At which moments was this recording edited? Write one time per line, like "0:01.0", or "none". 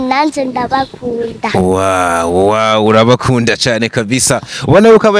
none